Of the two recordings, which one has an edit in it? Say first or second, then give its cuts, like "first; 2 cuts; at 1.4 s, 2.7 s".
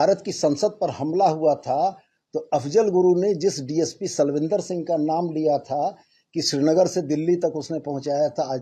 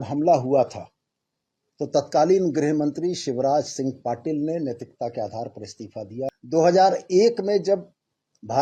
second; 1 cut; at 6.3 s